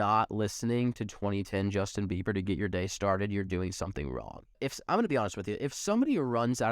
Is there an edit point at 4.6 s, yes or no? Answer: yes